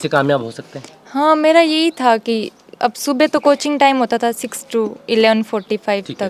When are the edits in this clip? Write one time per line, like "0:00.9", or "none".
none